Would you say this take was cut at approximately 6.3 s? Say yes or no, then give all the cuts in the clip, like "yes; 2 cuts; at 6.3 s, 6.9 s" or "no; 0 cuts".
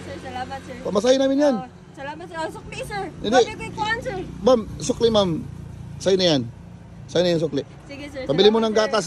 no; 0 cuts